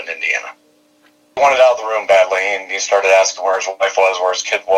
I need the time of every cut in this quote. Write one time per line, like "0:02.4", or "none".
0:01.3

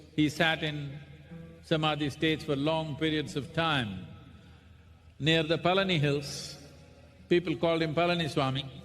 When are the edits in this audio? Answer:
0:04.2
0:07.9

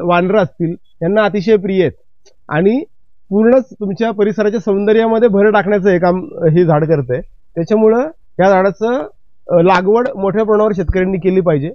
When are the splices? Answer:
none

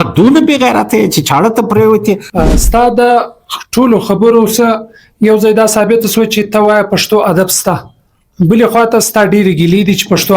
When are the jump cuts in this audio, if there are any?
0:02.3

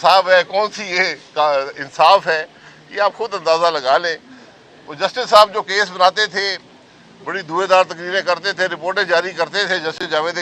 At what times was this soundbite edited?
none

